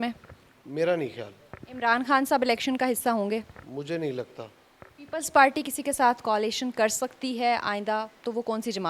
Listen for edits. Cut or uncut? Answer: uncut